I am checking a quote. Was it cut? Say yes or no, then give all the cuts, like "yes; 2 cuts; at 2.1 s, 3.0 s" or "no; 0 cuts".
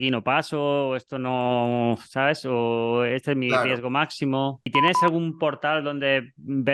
yes; 1 cut; at 4.7 s